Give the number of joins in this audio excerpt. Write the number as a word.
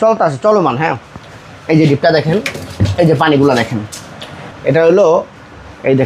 one